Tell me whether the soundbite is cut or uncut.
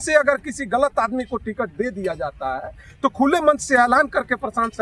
uncut